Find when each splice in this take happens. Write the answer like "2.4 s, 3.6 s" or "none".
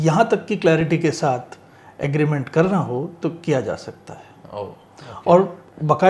none